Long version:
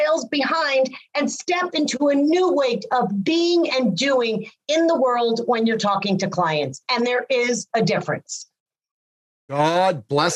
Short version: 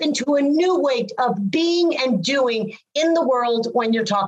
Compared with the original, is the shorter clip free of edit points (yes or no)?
yes